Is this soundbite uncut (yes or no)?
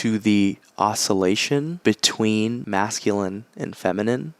no